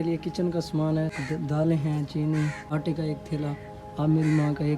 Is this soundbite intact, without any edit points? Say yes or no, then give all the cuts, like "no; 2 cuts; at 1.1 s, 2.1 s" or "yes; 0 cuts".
no; 2 cuts; at 1.2 s, 2.6 s